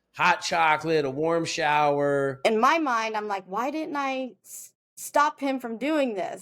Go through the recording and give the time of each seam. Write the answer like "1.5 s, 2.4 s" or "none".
2.4 s